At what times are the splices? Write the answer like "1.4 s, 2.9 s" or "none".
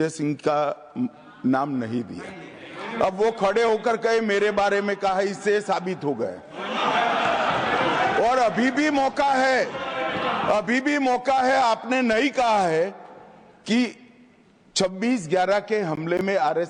none